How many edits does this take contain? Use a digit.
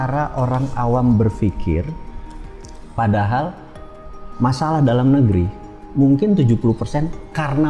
0